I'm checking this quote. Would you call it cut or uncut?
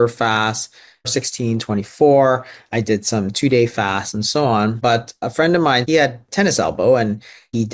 cut